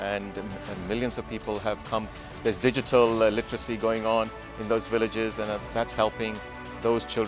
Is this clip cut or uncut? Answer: uncut